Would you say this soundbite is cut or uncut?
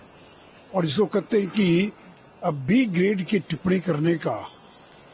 uncut